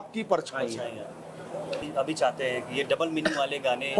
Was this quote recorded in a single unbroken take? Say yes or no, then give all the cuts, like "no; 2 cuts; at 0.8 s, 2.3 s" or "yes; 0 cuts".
yes; 0 cuts